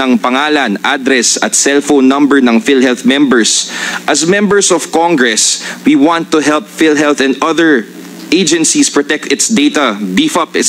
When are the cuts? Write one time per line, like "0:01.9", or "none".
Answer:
none